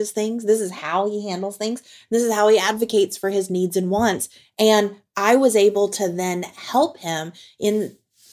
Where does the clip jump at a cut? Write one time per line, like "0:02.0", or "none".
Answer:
none